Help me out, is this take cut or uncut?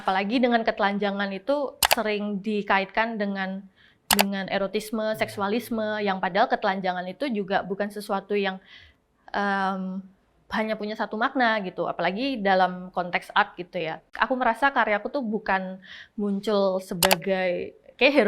cut